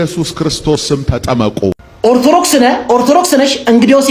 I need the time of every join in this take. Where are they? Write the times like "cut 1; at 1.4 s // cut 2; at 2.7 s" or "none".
cut 1; at 2.0 s